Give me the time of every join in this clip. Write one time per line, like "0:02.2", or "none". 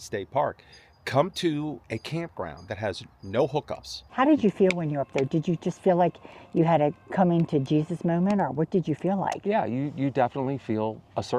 0:04.0